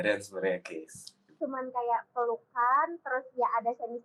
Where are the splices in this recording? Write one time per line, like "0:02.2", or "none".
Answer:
0:01.4